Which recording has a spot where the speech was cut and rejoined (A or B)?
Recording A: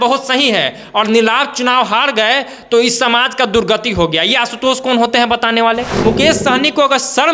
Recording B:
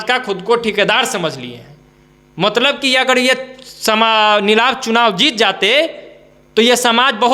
A